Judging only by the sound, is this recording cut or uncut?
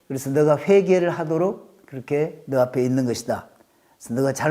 uncut